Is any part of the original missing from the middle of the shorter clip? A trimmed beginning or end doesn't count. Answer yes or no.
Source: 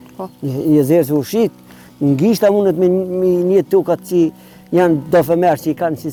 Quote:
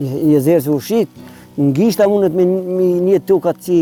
no